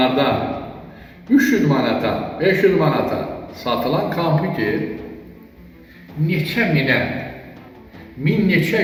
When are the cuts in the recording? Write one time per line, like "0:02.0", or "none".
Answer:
none